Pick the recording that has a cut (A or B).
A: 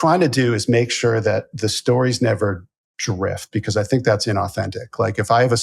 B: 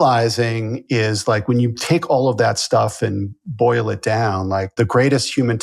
B